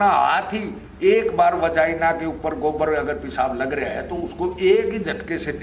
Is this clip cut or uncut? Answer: uncut